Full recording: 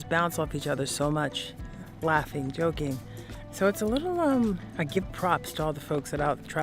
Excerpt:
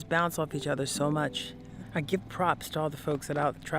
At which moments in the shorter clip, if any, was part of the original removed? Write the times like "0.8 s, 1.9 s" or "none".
1.8 s